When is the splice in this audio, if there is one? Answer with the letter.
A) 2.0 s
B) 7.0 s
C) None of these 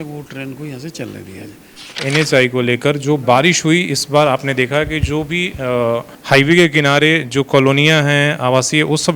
A